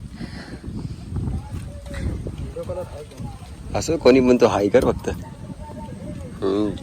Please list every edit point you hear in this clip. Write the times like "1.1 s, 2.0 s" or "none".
none